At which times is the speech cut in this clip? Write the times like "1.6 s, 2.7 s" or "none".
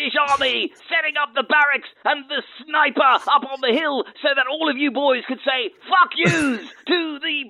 none